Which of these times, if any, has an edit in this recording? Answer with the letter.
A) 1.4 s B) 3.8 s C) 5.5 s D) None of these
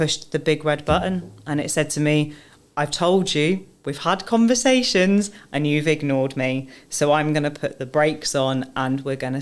D